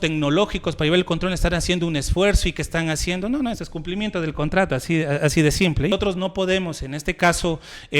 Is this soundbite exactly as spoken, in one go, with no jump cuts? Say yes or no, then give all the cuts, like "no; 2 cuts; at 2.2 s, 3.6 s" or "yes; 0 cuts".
no; 1 cut; at 5.9 s